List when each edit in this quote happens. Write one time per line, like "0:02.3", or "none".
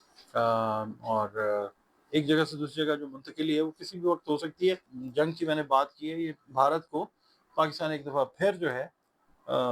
0:04.9